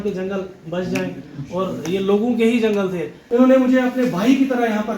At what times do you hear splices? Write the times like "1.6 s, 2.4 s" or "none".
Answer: 3.1 s